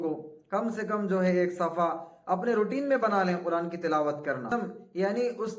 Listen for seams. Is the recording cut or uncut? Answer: cut